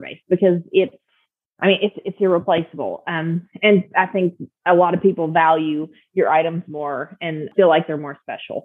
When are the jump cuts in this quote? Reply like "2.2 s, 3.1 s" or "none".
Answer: 7.4 s